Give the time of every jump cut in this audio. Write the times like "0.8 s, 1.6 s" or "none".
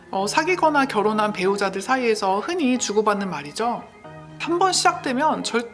4.5 s